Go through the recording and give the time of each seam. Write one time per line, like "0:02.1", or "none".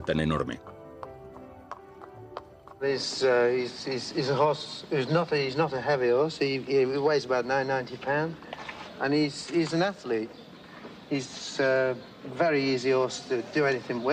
0:07.3